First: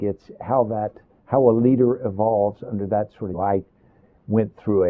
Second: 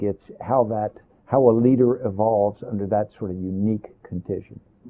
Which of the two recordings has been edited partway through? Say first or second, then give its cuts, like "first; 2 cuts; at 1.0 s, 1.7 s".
second; 1 cut; at 3.2 s